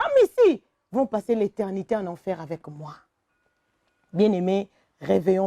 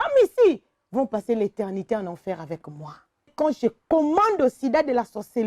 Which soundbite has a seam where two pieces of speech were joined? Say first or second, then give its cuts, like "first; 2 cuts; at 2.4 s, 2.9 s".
second; 1 cut; at 3.3 s